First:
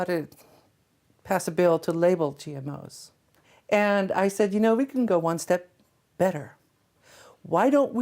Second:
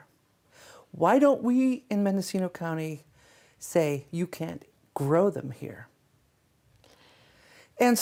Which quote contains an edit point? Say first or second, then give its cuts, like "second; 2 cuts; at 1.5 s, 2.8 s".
first; 1 cut; at 3.4 s